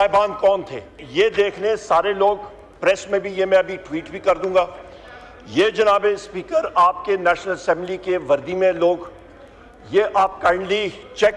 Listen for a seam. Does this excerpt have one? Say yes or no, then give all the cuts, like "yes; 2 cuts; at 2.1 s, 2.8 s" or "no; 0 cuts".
yes; 1 cut; at 1.0 s